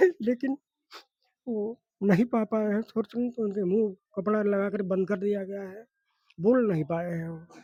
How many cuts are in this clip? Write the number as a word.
zero